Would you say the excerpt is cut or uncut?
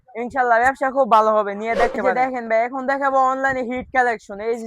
cut